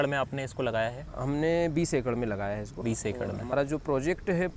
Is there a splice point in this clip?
no; 0 cuts

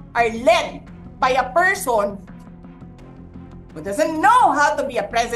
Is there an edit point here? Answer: yes; 2 cuts; at 2.2 s, 3.7 s

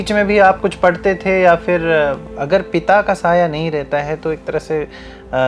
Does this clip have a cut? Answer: yes; 1 cut; at 2.2 s

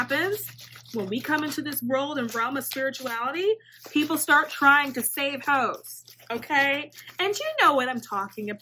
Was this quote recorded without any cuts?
yes; 0 cuts

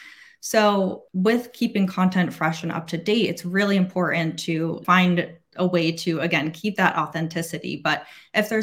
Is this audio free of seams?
no; 2 cuts; at 1.0 s, 4.8 s

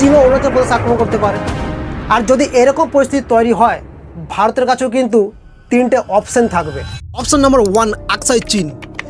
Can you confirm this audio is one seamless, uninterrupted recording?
yes; 0 cuts

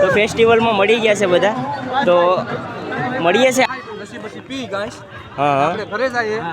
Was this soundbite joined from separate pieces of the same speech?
yes; 1 cut; at 3.7 s

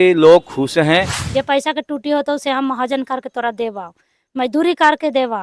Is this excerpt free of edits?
no; 1 cut; at 1.2 s

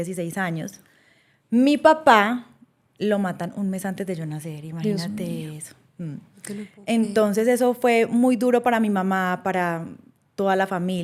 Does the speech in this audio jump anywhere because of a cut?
no; 0 cuts

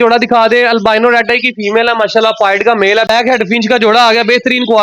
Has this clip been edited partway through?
yes; 1 cut; at 3.1 s

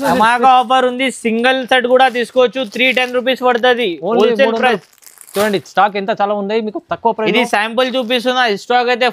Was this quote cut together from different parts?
no; 0 cuts

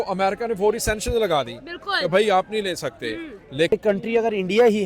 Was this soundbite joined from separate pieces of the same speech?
yes; 1 cut; at 3.7 s

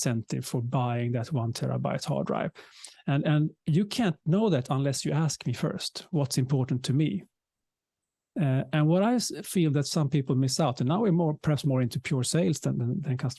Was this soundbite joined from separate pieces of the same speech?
no; 0 cuts

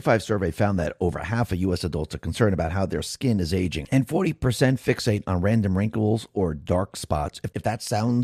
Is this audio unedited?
yes; 0 cuts

